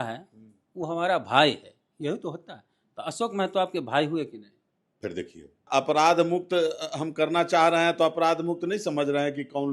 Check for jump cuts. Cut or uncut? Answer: cut